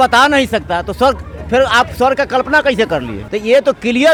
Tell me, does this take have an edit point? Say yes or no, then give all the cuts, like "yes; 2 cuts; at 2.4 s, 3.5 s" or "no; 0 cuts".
no; 0 cuts